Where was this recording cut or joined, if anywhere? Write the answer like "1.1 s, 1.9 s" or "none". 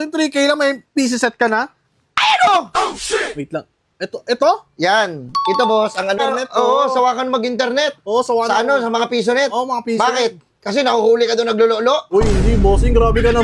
6.2 s